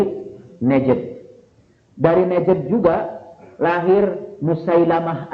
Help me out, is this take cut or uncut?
uncut